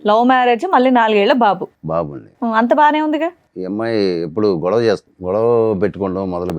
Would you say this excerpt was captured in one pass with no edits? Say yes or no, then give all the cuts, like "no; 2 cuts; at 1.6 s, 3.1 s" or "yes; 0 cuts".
no; 2 cuts; at 3.5 s, 5.1 s